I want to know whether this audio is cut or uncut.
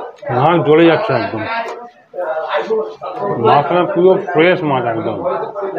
cut